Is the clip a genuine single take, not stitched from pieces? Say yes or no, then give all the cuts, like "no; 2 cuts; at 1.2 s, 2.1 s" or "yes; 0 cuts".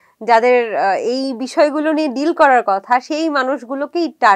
yes; 0 cuts